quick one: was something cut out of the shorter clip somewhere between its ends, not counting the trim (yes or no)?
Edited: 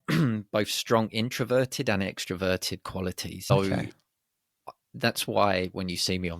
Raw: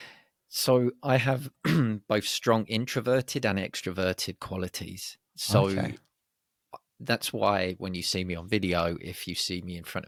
yes